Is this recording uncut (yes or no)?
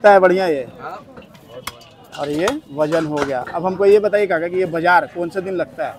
yes